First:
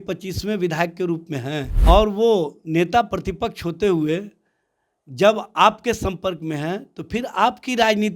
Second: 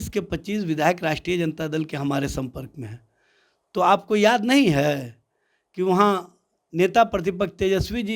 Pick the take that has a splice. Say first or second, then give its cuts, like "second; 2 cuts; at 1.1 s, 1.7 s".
first; 1 cut; at 1.7 s